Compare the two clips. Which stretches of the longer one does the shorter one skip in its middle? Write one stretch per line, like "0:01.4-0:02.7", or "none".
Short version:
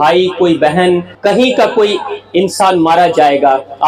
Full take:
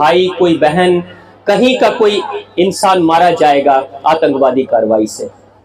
0:01.1-0:01.3